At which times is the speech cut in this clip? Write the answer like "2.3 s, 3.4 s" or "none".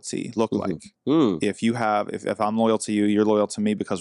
none